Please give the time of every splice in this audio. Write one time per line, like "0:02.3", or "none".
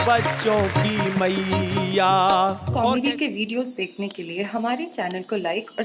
0:02.7